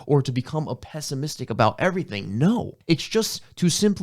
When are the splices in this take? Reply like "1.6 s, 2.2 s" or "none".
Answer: 2.7 s